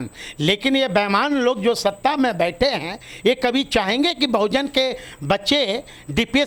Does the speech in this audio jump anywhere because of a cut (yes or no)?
no